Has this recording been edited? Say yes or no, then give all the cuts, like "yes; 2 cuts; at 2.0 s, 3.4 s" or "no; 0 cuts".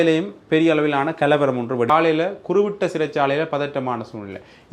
yes; 1 cut; at 1.9 s